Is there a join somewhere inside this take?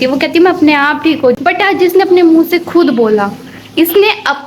yes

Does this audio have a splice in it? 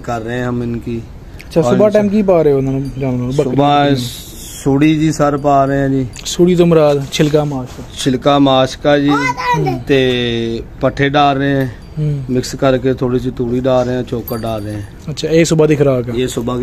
no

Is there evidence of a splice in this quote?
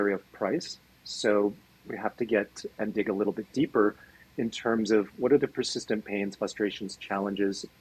no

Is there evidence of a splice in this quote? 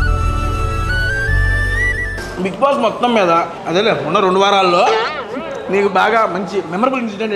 yes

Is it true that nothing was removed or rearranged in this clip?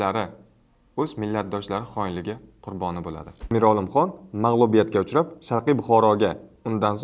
no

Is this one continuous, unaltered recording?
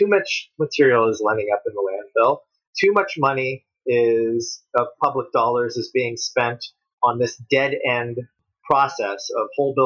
yes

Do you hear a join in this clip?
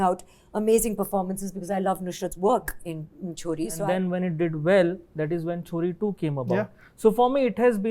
yes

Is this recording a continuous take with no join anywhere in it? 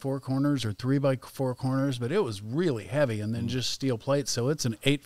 yes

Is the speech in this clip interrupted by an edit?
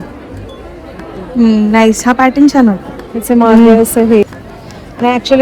yes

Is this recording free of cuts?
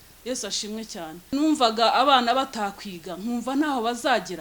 no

